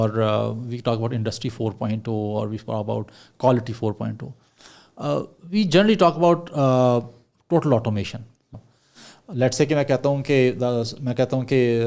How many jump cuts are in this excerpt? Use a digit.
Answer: 1